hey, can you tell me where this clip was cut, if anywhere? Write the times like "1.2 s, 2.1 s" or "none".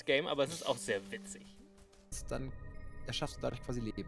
2.2 s